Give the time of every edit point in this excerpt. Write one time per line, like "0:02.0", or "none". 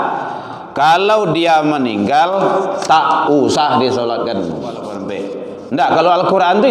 0:05.0